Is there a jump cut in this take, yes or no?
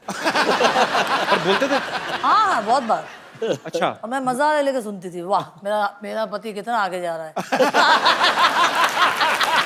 no